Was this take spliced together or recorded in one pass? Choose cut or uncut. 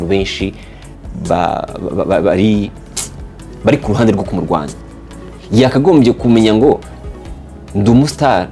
uncut